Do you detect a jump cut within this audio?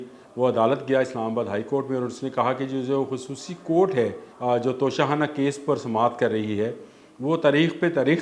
yes; 1 cut; at 4.3 s

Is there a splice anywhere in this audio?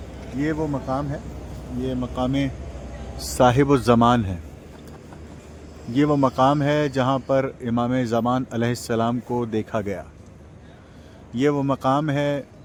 no; 0 cuts

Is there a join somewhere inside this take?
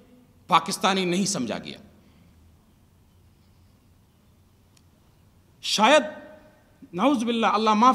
no; 0 cuts

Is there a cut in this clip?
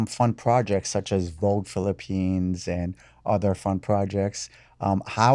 no; 0 cuts

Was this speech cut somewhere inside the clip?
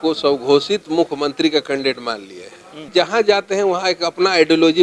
yes; 1 cut; at 2.8 s

